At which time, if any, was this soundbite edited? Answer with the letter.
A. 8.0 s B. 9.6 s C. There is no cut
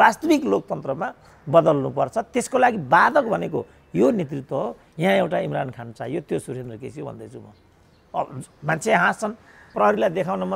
B